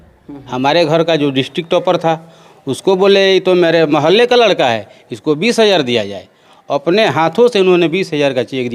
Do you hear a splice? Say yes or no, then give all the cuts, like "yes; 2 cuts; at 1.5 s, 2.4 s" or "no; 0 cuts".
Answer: no; 0 cuts